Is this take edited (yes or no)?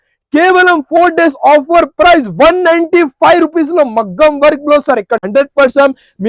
yes